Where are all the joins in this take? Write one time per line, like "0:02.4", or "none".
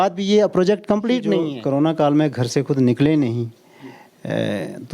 0:01.5